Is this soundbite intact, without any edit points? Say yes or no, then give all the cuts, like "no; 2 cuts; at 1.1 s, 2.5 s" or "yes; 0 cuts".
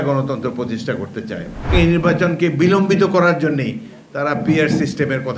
no; 1 cut; at 1.7 s